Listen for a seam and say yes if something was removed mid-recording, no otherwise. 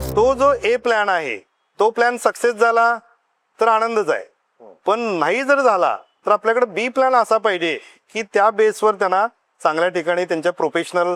no